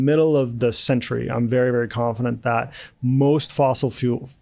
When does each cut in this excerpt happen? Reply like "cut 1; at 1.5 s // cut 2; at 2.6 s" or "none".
none